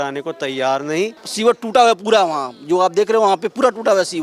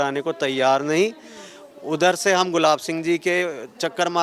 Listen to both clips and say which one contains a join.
first; 1 cut; at 1.2 s

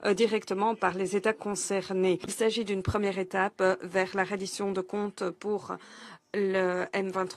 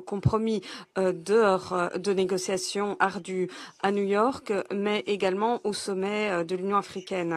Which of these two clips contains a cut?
first; 1 cut; at 2.3 s

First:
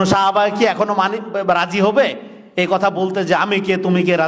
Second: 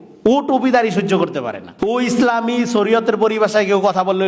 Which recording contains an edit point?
second; 1 cut; at 1.7 s

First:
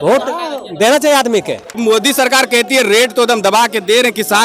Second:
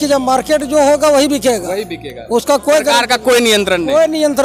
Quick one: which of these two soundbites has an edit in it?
first; 1 cut; at 1.8 s

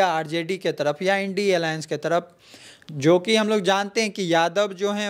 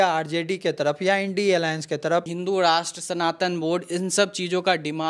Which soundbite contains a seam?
second; 1 cut; at 2.3 s

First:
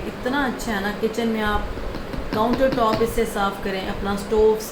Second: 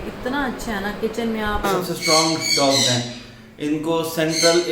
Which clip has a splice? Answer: second; 1 cut; at 1.7 s

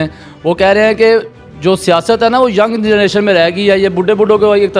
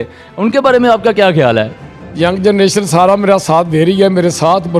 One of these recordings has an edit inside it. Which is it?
second; 1 cut; at 1.8 s

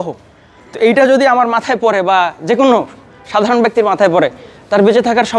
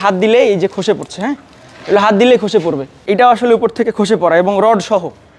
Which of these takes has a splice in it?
second; 1 cut; at 2.9 s

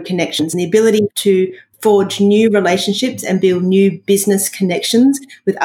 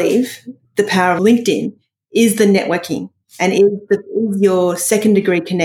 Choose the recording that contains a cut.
first; 1 cut; at 1.1 s

